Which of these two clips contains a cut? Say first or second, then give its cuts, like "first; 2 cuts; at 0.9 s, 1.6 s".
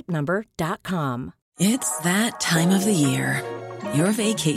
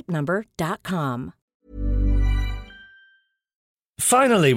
first; 1 cut; at 1.4 s